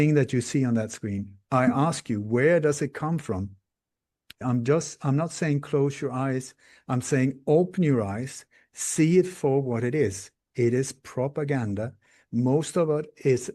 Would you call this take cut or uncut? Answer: cut